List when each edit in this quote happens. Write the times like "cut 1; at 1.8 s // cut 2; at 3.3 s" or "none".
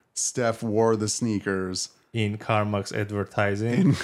none